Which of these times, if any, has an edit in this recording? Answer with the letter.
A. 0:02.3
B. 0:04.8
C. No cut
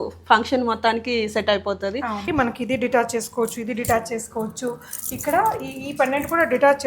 A